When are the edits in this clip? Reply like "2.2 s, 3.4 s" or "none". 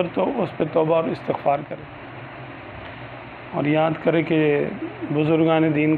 1.7 s